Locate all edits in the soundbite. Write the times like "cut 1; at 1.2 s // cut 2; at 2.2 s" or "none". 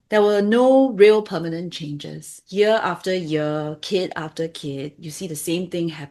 cut 1; at 2.4 s